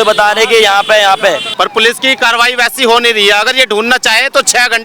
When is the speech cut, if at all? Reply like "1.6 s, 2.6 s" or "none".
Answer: 1.5 s